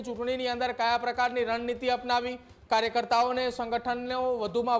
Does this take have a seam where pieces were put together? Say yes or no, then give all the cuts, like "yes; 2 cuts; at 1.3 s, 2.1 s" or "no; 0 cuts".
no; 0 cuts